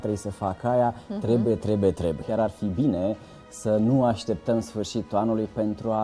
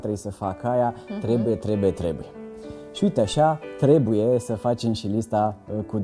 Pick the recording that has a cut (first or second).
first